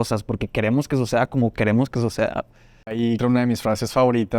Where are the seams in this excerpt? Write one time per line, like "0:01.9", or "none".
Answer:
0:03.1